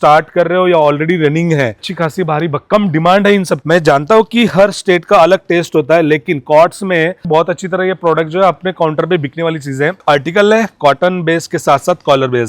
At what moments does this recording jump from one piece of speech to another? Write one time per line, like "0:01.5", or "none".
0:01.9
0:03.6
0:07.3
0:10.0